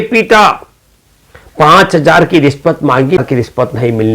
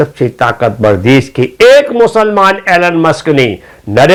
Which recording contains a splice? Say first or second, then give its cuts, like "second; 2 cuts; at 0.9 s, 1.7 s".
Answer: first; 1 cut; at 3.2 s